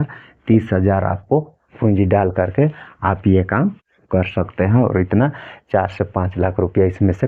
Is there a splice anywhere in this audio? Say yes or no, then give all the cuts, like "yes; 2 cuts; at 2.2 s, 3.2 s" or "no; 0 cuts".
no; 0 cuts